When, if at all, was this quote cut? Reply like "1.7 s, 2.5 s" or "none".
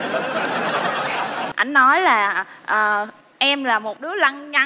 1.5 s